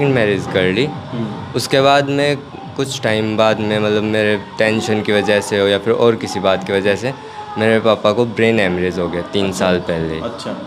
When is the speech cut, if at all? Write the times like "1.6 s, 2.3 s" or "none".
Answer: none